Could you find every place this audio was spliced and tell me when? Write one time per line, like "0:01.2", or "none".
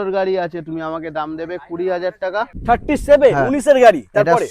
0:02.6